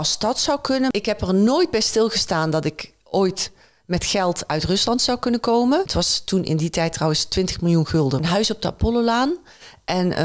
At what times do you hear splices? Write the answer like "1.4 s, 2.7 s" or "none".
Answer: 0.9 s, 5.9 s, 8.2 s